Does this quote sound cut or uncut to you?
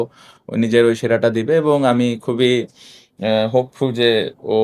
uncut